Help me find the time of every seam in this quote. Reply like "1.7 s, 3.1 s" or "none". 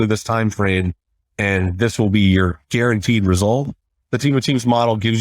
2.6 s, 3.9 s